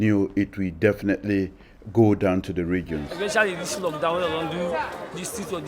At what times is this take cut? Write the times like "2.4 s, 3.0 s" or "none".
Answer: none